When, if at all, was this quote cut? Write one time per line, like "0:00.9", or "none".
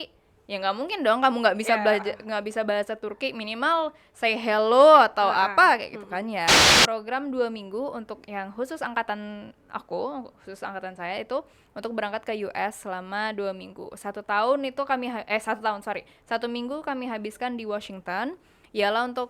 0:06.7